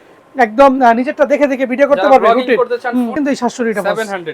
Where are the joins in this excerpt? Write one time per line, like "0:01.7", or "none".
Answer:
0:03.1

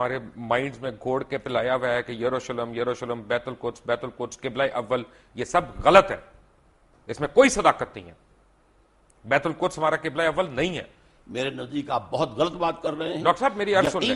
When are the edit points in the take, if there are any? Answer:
none

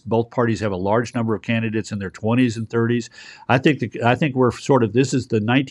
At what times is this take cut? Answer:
none

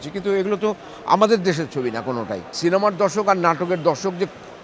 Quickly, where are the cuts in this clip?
0:02.4

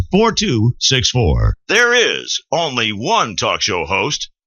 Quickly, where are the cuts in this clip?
0:01.5

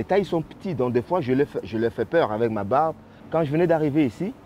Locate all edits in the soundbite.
0:03.1

